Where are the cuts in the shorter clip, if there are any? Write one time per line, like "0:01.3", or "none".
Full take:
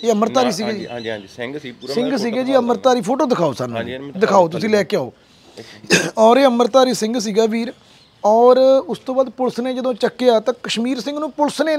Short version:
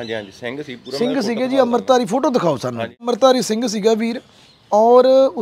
0:03.1